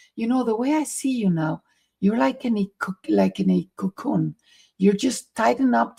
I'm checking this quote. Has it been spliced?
no; 0 cuts

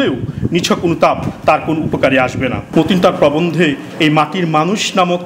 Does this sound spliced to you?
yes; 1 cut; at 2.6 s

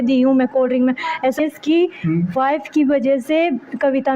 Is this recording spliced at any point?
yes; 1 cut; at 1.4 s

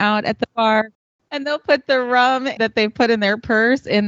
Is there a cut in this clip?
yes; 2 cuts; at 1.0 s, 2.5 s

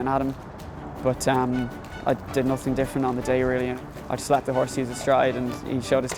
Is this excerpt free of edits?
no; 2 cuts; at 1.8 s, 3.8 s

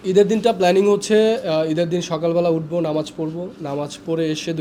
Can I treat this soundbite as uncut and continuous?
yes; 0 cuts

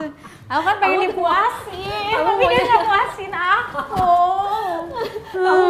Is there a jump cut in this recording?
no; 0 cuts

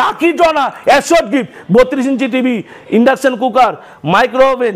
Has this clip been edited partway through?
no; 0 cuts

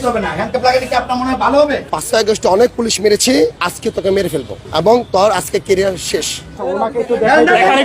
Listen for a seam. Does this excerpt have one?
yes; 4 cuts; at 1.9 s, 3.7 s, 4.6 s, 6.6 s

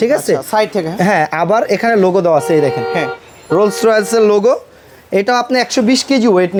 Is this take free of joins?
yes; 0 cuts

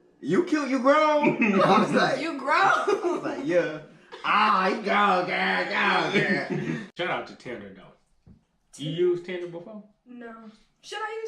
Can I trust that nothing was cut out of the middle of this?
no; 1 cut; at 6.9 s

